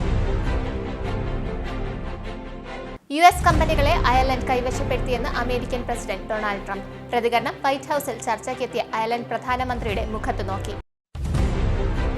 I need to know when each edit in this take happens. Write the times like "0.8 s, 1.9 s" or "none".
1.1 s